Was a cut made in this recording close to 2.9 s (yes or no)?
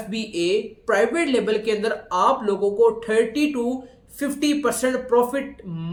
no